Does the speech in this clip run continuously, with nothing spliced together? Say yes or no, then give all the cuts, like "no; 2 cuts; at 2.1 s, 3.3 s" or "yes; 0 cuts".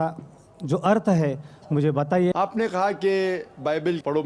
no; 1 cut; at 2.3 s